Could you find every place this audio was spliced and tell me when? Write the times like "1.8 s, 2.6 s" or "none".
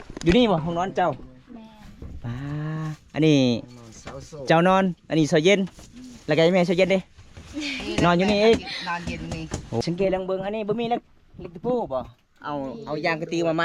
9.7 s